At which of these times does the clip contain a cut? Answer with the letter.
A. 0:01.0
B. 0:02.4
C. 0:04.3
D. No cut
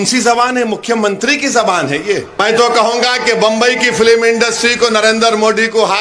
B